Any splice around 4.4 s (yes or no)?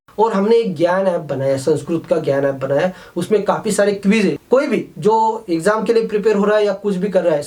yes